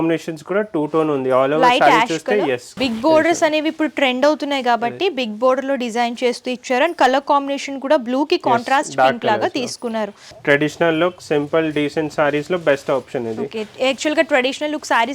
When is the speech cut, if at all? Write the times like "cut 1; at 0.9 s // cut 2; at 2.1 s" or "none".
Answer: cut 1; at 2.7 s // cut 2; at 10.3 s